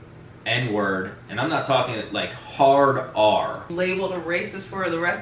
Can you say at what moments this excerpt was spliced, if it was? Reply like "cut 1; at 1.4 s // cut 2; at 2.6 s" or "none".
cut 1; at 3.7 s